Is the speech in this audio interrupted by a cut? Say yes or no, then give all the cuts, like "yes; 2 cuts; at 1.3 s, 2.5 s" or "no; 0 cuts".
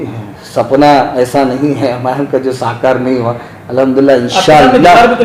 no; 0 cuts